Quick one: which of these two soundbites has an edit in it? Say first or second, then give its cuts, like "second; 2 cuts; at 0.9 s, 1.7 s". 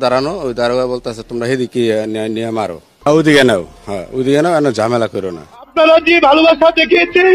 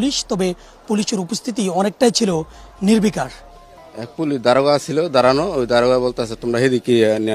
first; 1 cut; at 5.7 s